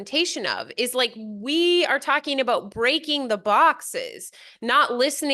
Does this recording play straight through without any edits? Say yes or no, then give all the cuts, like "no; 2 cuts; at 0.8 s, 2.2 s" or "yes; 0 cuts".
yes; 0 cuts